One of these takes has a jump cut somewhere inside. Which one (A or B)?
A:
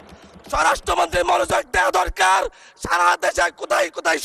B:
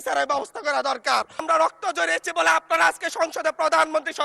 B